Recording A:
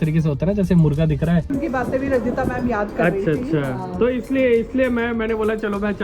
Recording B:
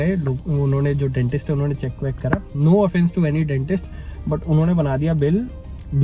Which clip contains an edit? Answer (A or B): A